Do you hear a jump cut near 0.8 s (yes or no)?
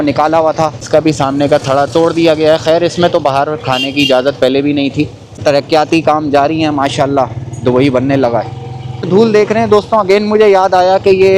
yes